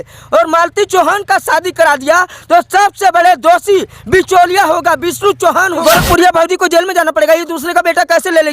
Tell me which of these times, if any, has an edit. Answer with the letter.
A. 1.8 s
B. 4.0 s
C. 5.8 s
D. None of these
C